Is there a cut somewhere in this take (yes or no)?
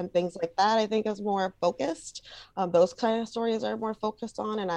no